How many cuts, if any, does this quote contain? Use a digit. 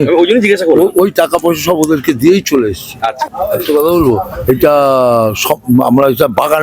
1